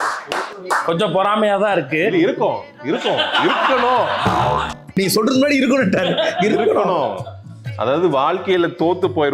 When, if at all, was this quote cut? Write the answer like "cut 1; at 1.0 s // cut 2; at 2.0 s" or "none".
cut 1; at 7.8 s